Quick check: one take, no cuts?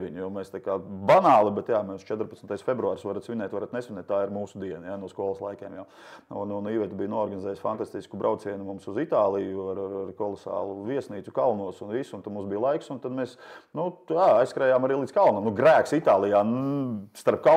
yes; 0 cuts

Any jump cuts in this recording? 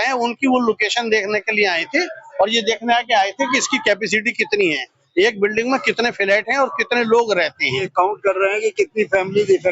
yes; 1 cut; at 7.9 s

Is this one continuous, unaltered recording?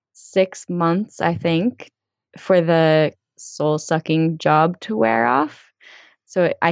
no; 2 cuts; at 2.0 s, 3.2 s

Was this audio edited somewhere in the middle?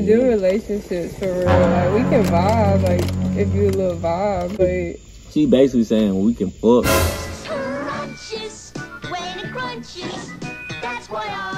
yes; 1 cut; at 4.6 s

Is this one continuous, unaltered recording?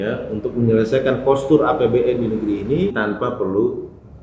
no; 1 cut; at 2.9 s

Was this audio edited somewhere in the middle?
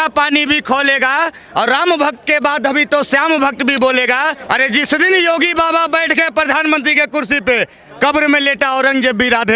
yes; 1 cut; at 4.4 s

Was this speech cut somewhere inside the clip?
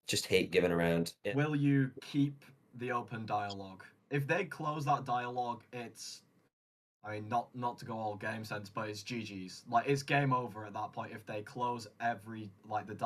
yes; 1 cut; at 1.1 s

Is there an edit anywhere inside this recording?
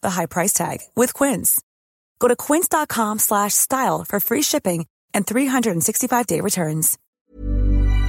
yes; 1 cut; at 7.0 s

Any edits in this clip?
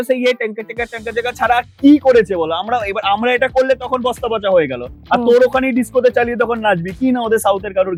no; 0 cuts

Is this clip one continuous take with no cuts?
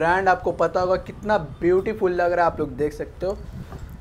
yes; 0 cuts

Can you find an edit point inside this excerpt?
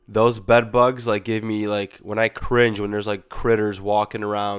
no; 0 cuts

